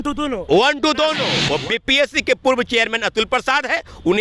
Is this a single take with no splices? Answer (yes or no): no